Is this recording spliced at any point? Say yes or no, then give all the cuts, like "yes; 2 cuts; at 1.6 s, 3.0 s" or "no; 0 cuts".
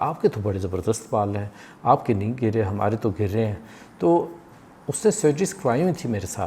no; 0 cuts